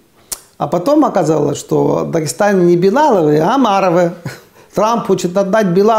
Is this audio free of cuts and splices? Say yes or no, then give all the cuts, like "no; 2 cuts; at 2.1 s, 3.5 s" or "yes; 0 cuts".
no; 1 cut; at 4.6 s